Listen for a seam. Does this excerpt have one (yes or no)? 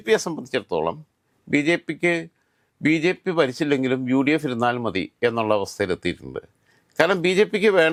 no